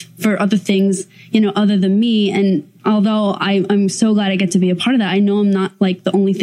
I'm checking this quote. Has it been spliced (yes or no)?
no